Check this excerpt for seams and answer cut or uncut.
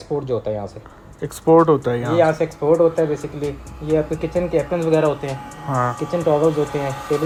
uncut